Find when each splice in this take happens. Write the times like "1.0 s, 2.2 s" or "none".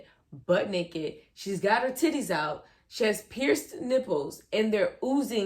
none